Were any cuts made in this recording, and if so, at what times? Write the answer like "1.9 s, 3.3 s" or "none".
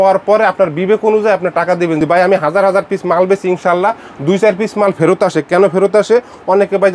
none

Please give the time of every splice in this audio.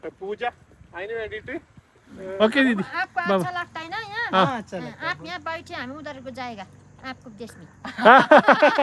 2.3 s

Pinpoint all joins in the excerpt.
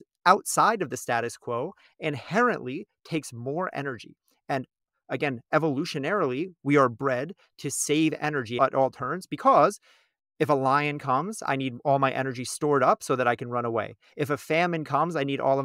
8.5 s

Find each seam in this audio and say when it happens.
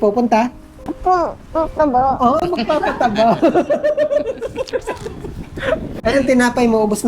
5.9 s

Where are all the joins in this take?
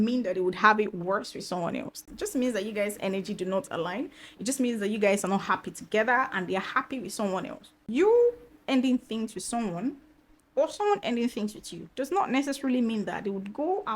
2.0 s, 7.8 s

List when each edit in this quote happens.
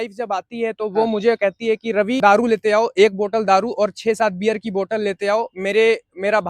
2.2 s

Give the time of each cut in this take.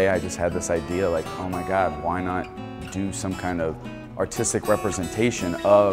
none

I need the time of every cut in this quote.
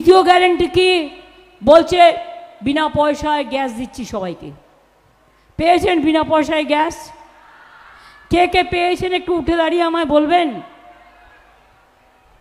none

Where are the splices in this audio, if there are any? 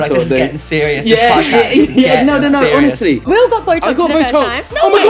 3.2 s

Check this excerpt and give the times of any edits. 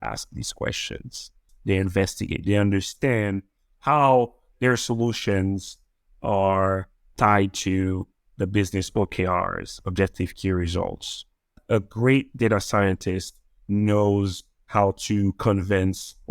1.5 s, 11.6 s

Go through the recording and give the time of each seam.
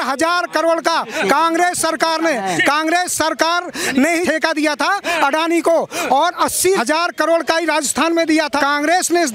4.2 s, 6.7 s, 8.6 s

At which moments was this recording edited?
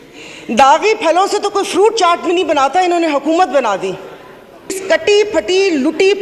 4.8 s

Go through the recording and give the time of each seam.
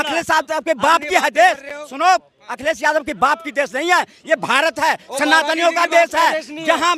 none

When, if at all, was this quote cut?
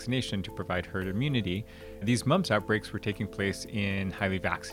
2.0 s

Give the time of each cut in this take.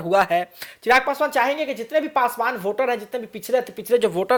none

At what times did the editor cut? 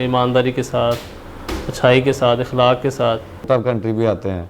3.4 s

